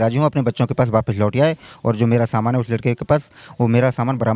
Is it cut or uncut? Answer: uncut